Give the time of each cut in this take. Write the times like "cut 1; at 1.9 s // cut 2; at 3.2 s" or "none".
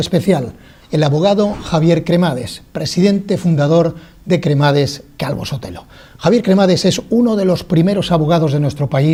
none